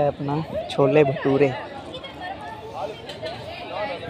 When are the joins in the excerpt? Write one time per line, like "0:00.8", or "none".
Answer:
none